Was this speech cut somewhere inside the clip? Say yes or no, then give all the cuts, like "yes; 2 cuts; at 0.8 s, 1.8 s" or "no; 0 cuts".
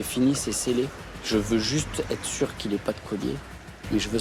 no; 0 cuts